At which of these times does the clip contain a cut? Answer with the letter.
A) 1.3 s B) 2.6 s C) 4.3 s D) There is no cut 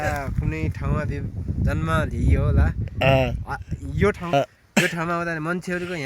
C